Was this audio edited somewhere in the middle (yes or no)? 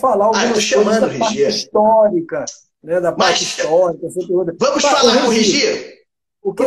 no